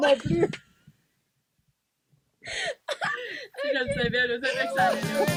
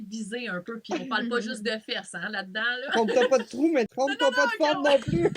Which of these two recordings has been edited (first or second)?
second